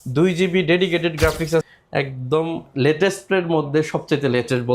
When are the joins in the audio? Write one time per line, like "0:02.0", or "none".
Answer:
0:01.6